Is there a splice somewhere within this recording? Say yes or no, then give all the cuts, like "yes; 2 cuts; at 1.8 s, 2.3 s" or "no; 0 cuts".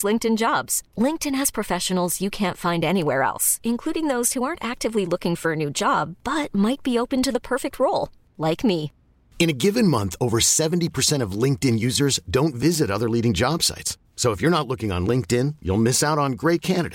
no; 0 cuts